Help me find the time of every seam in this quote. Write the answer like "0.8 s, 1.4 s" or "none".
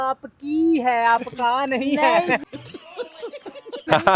none